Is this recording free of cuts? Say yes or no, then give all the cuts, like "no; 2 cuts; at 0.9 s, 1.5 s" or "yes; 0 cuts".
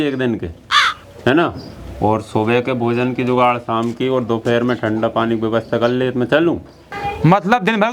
yes; 0 cuts